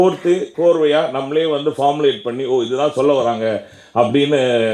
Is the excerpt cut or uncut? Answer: uncut